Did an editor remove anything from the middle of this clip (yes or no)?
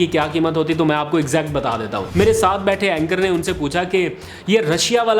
yes